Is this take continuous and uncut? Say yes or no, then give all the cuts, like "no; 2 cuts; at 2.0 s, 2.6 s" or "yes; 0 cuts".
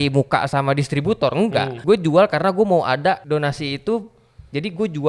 no; 2 cuts; at 1.7 s, 3.2 s